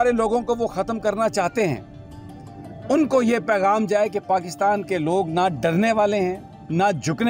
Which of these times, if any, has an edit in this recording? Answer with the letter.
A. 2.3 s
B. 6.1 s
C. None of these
C